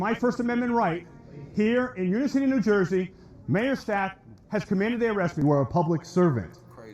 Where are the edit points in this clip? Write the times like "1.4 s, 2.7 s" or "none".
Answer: 5.4 s